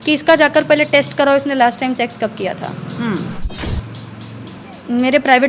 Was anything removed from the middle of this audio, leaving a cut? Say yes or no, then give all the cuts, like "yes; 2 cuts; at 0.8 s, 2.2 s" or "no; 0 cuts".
yes; 1 cut; at 3.5 s